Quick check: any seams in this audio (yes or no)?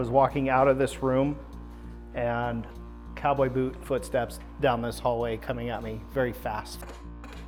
no